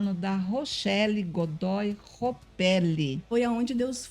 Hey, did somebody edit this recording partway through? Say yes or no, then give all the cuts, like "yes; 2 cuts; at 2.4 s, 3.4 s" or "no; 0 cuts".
yes; 1 cut; at 3.2 s